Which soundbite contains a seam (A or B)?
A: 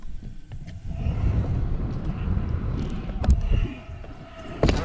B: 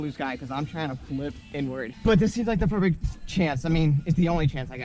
B